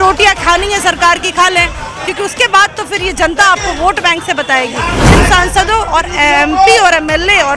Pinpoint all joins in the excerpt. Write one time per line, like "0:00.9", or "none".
0:05.0